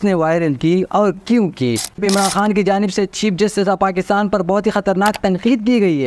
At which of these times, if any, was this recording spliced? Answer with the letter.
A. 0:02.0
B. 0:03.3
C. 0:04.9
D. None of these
A